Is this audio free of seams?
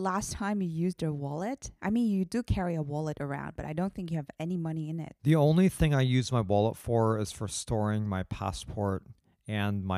yes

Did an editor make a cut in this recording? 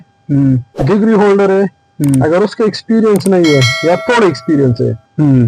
no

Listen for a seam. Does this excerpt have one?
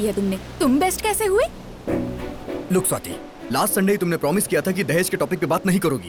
no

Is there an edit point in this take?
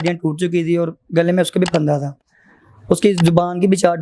no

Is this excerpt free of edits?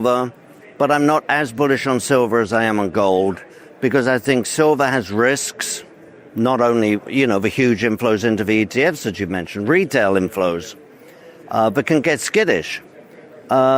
yes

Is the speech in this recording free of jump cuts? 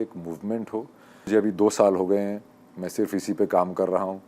no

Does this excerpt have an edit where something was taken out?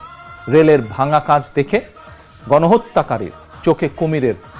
no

